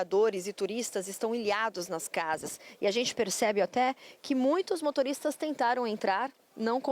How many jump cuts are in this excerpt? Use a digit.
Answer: 0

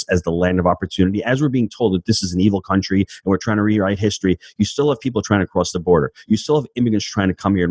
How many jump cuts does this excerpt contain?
0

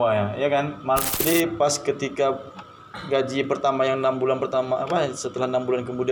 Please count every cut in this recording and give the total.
1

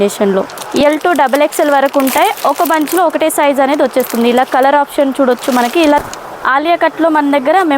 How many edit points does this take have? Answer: 2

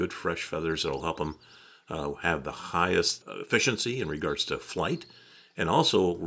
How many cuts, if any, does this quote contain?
1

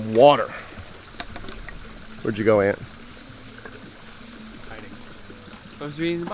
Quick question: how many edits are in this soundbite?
0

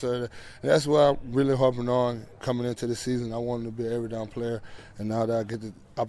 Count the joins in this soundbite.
0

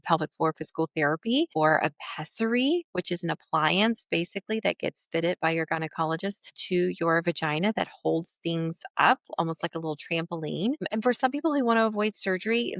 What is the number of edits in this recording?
0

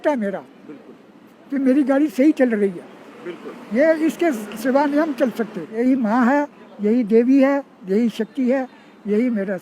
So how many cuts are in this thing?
1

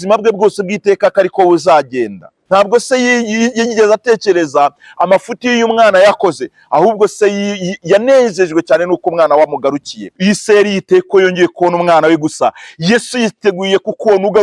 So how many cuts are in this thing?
2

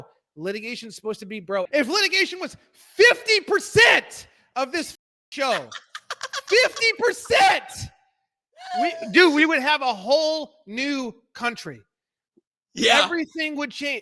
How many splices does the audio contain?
1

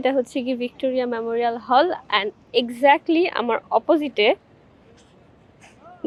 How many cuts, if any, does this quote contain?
0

